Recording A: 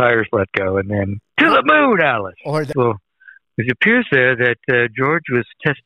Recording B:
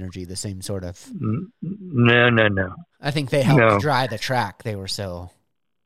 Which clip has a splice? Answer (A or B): A